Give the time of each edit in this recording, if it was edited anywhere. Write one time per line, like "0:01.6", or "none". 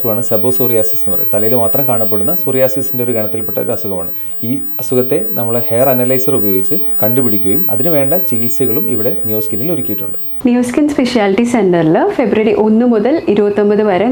0:10.3

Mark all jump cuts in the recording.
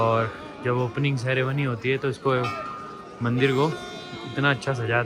none

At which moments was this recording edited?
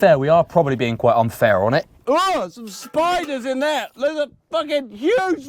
0:01.9

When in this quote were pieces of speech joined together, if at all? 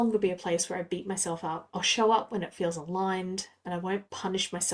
0:01.6

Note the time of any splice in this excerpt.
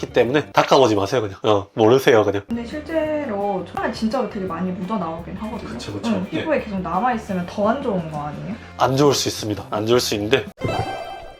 0:02.4
0:10.5

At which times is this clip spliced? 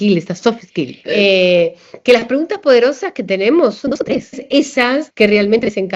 0:01.0
0:04.8

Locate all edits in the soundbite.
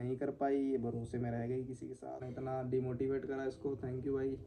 0:02.3

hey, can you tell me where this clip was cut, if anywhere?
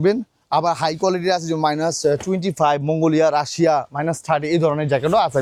none

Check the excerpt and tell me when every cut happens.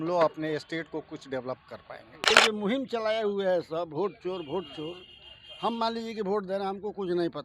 0:02.3

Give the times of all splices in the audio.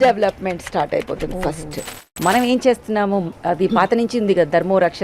0:02.0

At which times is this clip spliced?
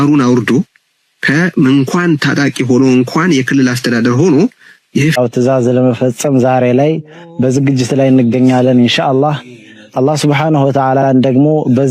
0:05.1

